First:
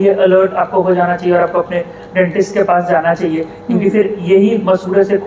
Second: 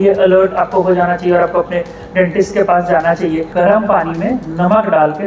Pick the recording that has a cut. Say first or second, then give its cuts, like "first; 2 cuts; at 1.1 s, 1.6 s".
second; 1 cut; at 3.5 s